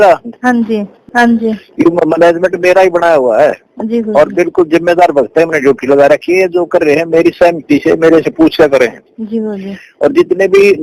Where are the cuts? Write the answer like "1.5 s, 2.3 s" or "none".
1.0 s